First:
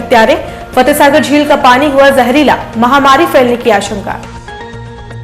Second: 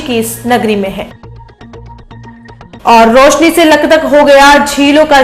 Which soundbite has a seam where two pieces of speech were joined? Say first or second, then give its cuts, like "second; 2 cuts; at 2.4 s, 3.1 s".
first; 1 cut; at 4.2 s